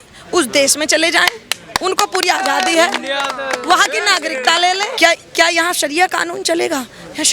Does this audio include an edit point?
yes; 1 cut; at 4.9 s

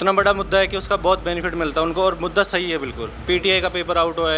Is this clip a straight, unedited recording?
no; 1 cut; at 3.2 s

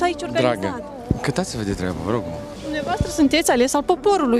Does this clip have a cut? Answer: yes; 1 cut; at 2.5 s

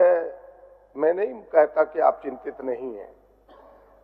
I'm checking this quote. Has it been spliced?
no; 0 cuts

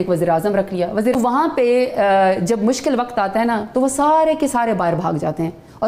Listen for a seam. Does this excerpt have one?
yes; 1 cut; at 1.1 s

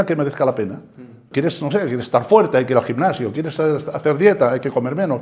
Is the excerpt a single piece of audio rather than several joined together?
no; 1 cut; at 1.3 s

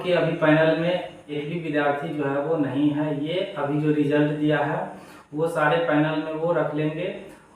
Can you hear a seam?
yes; 1 cut; at 1.4 s

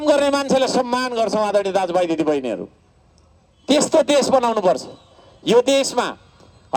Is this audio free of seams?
yes; 0 cuts

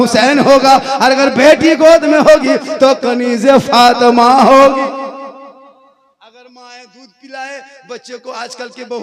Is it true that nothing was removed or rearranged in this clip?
yes; 0 cuts

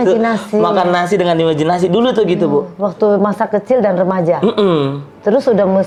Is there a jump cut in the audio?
no; 0 cuts

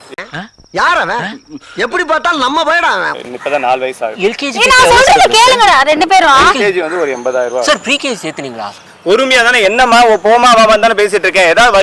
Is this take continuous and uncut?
no; 2 cuts; at 3.2 s, 8.8 s

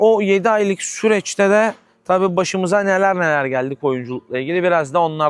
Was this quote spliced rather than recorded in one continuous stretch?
no; 0 cuts

